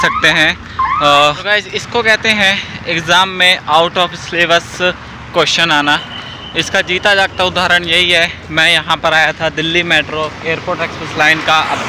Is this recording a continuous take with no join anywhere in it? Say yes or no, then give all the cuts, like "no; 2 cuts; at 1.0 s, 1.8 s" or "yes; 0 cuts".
no; 1 cut; at 1.4 s